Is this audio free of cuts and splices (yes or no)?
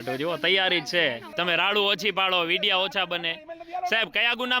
no